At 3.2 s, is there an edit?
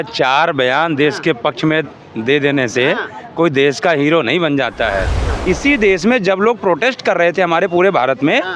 no; 1 cut; at 5.3 s

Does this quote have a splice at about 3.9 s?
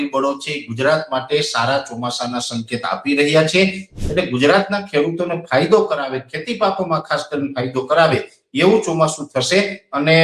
yes; 1 cut; at 3.9 s

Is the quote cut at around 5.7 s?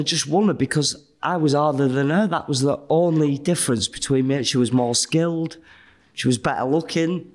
no; 1 cut; at 2.8 s

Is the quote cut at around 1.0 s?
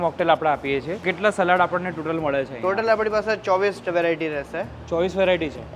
yes; 1 cut; at 1.0 s

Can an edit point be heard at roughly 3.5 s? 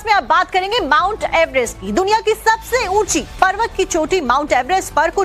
yes; 1 cut; at 3.5 s

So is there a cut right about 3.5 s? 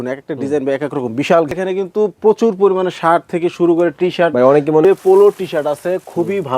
no; 1 cut; at 1.5 s

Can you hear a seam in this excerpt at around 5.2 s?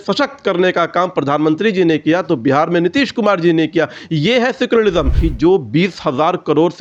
yes; 1 cut; at 5.2 s

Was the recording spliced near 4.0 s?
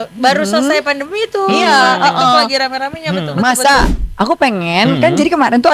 yes; 1 cut; at 4.0 s

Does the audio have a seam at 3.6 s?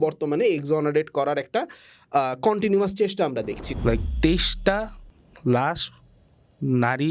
yes; 1 cut; at 3.6 s

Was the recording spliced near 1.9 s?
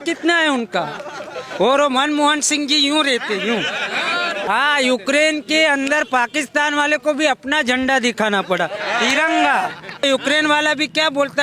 no; 2 cuts; at 4.5 s, 10.0 s

